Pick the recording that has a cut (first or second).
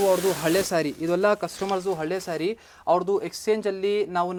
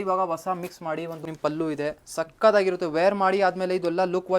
second